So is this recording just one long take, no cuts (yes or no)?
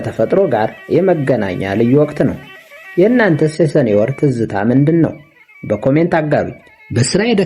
yes